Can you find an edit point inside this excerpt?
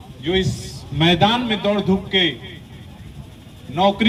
no; 0 cuts

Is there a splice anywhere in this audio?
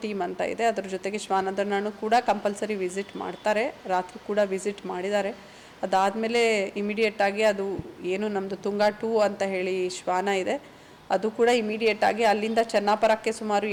no; 0 cuts

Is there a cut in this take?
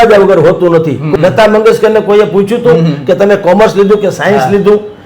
yes; 1 cut; at 1.0 s

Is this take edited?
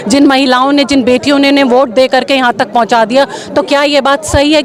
no; 0 cuts

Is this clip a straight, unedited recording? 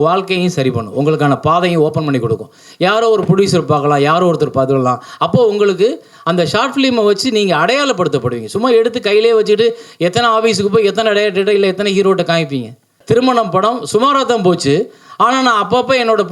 no; 1 cut; at 12.9 s

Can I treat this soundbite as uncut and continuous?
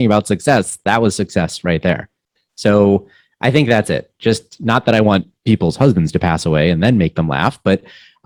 yes; 0 cuts

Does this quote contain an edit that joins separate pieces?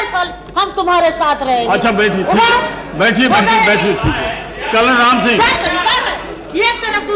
no; 0 cuts

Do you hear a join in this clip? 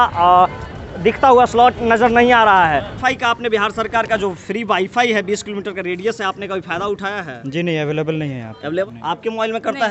yes; 2 cuts; at 3.0 s, 8.9 s

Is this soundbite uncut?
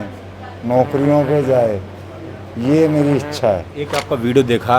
no; 1 cut; at 3.8 s

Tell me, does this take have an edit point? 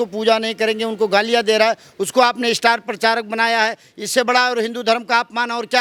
no; 0 cuts

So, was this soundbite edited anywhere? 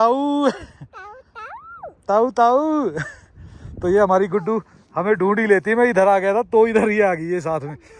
no; 0 cuts

